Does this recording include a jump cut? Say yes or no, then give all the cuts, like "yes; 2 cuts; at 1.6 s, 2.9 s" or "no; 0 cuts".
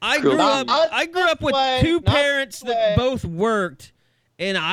no; 0 cuts